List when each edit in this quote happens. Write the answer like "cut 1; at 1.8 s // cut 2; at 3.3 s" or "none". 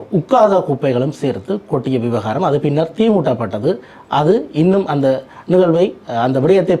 none